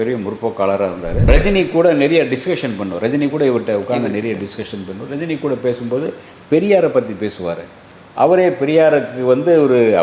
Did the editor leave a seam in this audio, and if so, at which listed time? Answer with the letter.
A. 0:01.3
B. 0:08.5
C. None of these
A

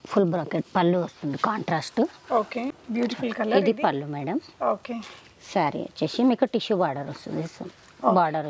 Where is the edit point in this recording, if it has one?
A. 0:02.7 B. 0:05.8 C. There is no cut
A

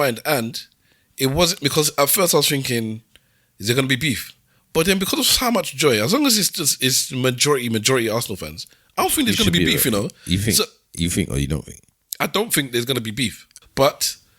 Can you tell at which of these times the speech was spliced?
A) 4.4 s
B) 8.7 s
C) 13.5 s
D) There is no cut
C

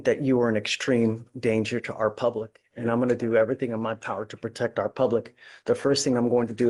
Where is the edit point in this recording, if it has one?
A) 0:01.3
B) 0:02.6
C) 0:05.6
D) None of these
D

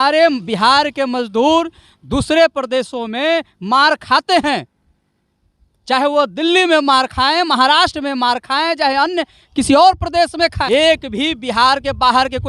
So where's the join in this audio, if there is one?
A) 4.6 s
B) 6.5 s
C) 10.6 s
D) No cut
C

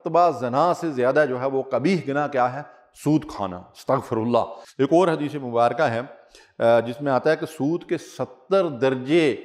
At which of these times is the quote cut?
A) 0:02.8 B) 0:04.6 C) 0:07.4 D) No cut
B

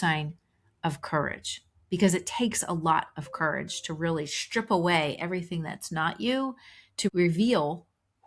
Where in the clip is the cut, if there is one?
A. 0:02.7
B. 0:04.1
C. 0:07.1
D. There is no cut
C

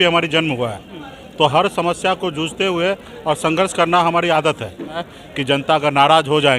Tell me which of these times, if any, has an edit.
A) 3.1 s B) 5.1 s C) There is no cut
B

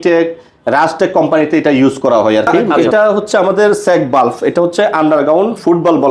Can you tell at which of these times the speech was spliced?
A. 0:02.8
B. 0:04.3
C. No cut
A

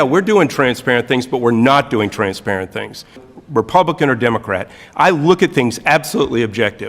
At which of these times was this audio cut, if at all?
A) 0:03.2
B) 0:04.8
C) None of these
A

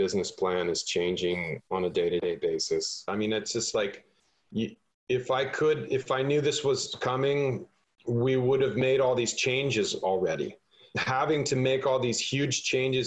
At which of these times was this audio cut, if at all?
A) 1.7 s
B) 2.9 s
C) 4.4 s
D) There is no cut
B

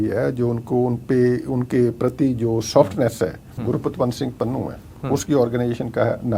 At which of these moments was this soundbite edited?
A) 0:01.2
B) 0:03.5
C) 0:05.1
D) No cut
B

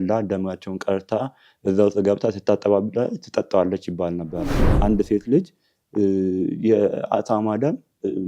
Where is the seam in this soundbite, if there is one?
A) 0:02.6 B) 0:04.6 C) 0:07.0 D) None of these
B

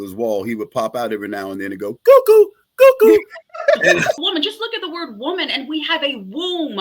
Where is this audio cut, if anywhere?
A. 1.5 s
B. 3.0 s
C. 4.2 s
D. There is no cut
C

